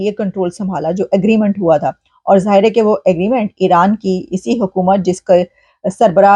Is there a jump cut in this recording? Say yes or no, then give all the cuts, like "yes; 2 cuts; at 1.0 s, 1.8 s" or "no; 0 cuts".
no; 0 cuts